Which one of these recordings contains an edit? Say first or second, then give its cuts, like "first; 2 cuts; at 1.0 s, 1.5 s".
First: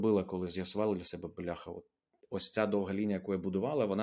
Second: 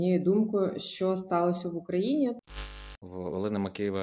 second; 1 cut; at 2.8 s